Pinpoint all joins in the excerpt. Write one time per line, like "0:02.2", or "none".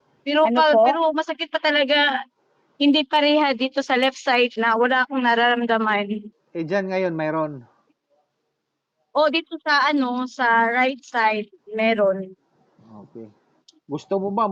none